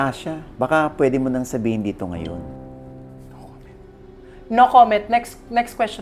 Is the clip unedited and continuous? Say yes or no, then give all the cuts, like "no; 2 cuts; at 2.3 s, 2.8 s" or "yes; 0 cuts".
yes; 0 cuts